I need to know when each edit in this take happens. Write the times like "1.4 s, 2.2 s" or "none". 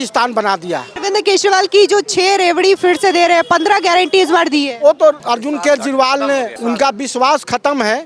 0.9 s, 5.2 s, 6.5 s

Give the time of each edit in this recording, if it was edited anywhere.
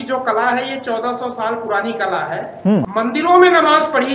2.8 s

